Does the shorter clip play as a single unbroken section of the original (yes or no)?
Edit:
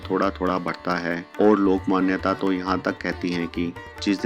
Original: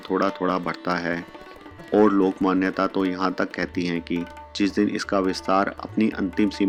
no